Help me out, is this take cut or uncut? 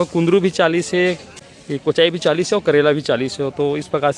cut